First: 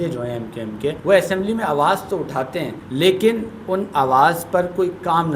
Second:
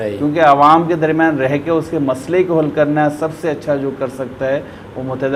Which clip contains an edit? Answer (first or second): first